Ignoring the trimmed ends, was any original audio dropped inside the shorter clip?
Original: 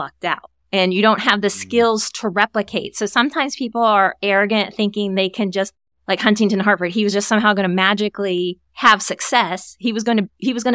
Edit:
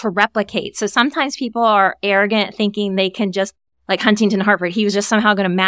no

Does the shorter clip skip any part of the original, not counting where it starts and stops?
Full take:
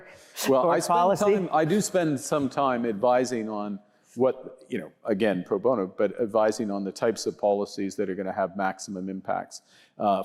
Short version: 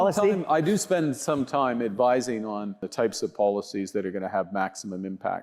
yes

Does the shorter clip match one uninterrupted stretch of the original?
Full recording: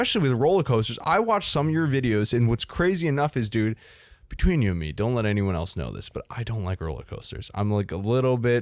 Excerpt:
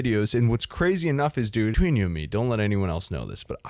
no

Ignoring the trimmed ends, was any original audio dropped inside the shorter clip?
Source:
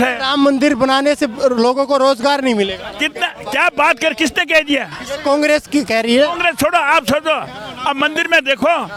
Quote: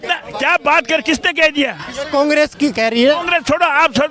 no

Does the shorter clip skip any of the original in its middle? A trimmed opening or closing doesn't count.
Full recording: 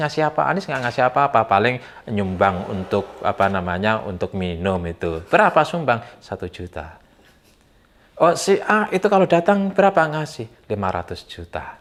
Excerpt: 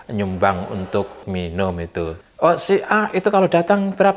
yes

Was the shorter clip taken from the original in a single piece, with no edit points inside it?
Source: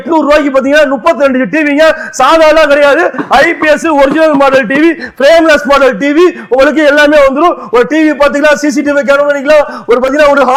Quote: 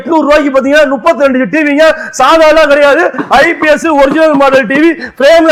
yes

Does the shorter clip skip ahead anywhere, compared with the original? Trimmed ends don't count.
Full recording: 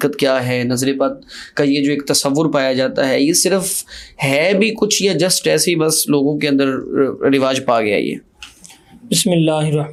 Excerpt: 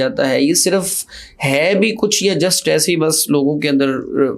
no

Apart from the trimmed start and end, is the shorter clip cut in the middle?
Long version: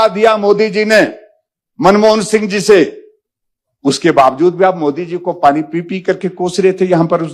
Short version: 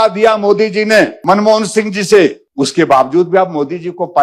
yes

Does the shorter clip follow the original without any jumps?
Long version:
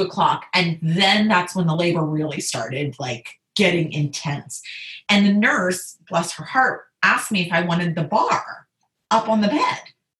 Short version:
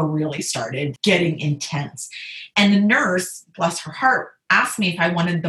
no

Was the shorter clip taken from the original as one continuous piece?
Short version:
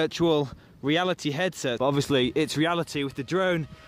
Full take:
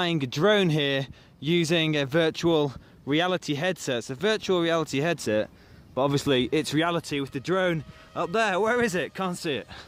no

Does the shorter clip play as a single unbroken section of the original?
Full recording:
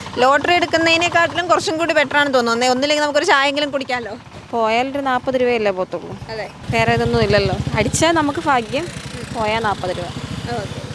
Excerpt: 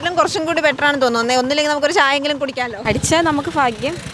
no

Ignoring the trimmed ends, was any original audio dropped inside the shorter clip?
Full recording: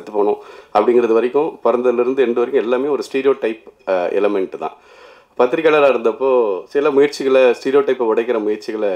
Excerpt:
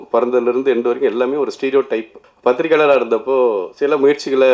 yes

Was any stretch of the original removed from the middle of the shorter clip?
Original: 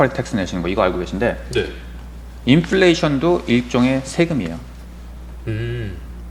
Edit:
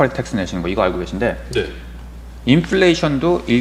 no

